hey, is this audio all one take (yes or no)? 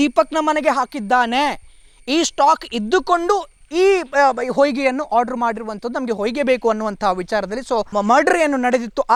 yes